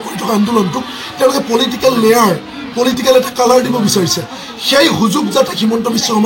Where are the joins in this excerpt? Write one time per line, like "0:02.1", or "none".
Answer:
none